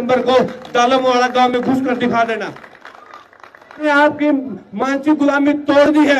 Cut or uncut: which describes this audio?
cut